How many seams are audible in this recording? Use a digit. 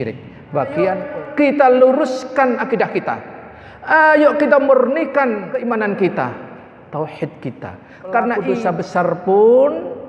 3